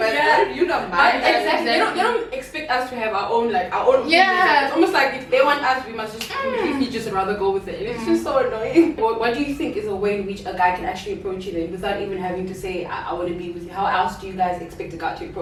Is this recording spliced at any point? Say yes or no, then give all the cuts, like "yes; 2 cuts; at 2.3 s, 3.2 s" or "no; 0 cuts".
no; 0 cuts